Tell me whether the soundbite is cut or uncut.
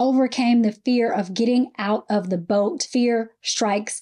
cut